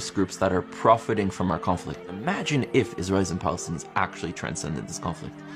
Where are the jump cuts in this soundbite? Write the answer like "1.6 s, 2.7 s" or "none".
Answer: 2.1 s